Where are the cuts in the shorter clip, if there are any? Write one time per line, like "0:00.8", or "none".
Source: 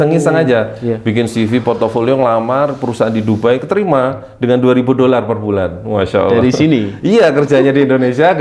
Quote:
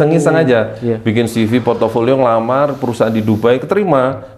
none